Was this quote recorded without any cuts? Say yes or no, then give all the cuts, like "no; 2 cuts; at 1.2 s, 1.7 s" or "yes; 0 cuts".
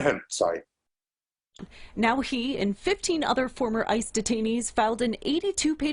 no; 1 cut; at 1.6 s